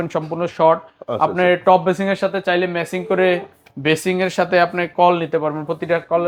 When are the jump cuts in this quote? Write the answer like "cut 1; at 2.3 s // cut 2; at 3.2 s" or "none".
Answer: none

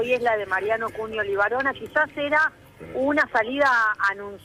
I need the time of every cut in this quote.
none

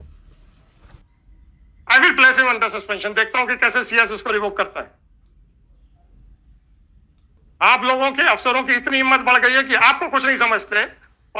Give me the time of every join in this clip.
cut 1; at 1.0 s // cut 2; at 7.4 s

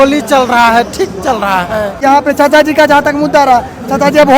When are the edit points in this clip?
cut 1; at 2.0 s

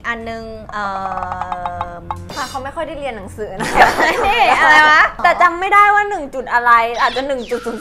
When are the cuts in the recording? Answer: cut 1; at 2.3 s // cut 2; at 5.1 s

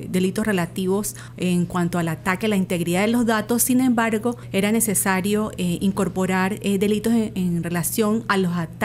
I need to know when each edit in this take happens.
cut 1; at 1.2 s // cut 2; at 4.4 s

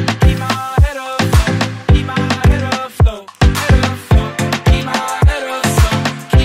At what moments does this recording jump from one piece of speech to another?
cut 1; at 1.4 s

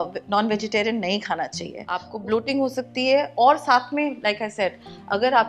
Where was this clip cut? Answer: cut 1; at 2.1 s

